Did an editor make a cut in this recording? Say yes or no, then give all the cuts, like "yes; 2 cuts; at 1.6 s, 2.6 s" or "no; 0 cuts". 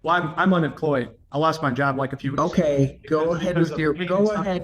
yes; 1 cut; at 1.2 s